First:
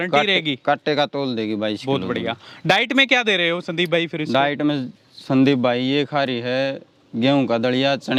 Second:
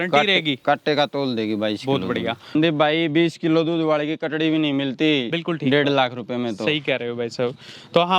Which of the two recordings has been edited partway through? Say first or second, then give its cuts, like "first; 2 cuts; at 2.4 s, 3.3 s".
second; 1 cut; at 2.5 s